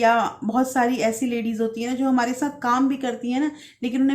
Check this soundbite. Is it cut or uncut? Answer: uncut